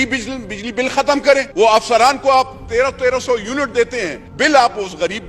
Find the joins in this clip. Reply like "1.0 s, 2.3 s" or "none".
1.5 s, 4.2 s